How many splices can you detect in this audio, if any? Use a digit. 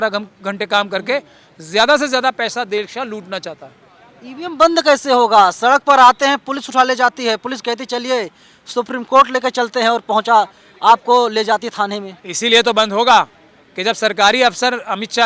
0